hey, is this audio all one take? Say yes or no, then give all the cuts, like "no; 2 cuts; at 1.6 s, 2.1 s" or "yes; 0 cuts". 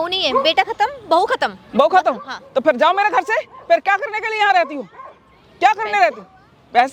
yes; 0 cuts